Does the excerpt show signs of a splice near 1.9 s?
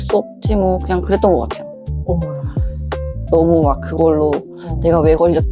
no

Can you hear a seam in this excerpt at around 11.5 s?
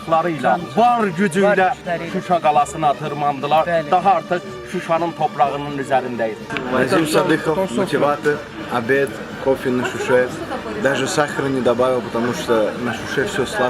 no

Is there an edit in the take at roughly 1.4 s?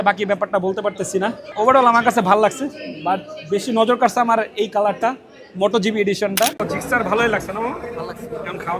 yes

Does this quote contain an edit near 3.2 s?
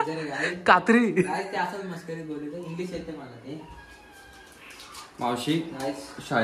no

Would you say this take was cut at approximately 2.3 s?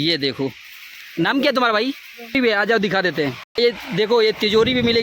yes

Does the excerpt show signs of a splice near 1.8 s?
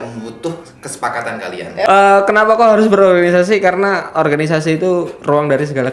yes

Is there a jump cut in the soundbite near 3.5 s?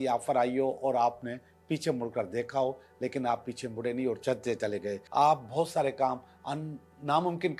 no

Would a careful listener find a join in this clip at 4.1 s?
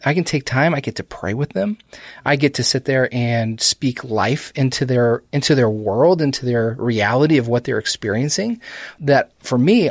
no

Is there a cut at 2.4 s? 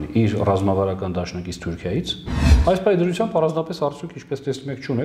yes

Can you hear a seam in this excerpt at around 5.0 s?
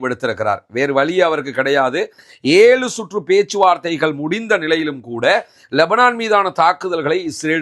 no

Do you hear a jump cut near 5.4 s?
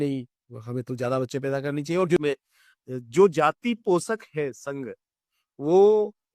no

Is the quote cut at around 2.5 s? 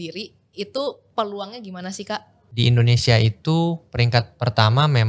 yes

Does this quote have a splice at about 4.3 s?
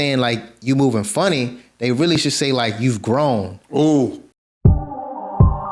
yes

